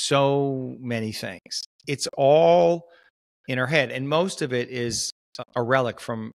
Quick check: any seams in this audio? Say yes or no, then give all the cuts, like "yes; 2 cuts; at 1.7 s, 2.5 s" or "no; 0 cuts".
yes; 2 cuts; at 1.7 s, 5.4 s